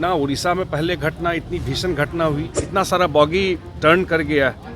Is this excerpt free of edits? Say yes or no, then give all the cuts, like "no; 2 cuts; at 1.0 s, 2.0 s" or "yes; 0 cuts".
no; 1 cut; at 2.6 s